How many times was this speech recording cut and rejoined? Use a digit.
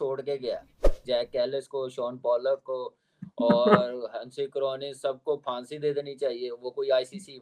1